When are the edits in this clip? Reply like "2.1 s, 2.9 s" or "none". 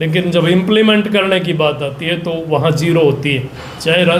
none